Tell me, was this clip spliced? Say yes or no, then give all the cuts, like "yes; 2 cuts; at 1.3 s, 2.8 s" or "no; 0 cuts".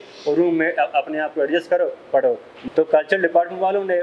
yes; 1 cut; at 2.6 s